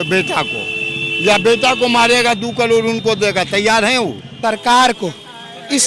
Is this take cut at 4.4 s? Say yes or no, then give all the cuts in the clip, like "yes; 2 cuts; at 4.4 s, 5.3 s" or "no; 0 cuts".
yes; 1 cut; at 4.4 s